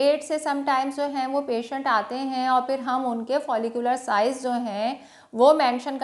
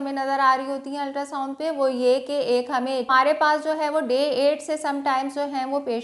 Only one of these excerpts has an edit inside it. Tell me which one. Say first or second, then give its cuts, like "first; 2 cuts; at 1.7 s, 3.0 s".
second; 1 cut; at 3.1 s